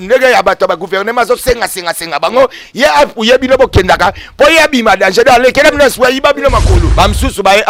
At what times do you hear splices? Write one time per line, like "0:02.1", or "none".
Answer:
0:06.8